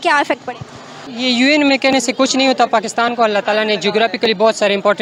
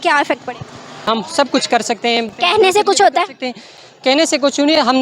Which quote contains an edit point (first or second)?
second